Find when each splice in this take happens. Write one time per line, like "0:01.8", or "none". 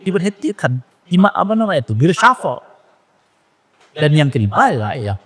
none